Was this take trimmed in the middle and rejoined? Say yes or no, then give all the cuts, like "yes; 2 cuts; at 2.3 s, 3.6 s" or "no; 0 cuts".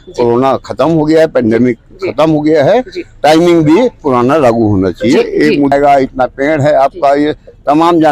yes; 1 cut; at 5.7 s